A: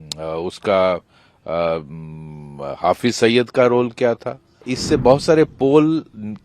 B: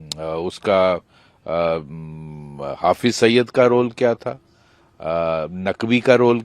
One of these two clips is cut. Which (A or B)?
A